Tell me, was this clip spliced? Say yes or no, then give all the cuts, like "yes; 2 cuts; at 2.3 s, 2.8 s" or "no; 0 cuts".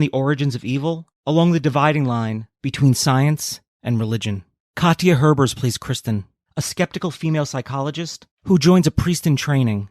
no; 0 cuts